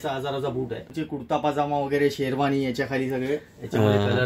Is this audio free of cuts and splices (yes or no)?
no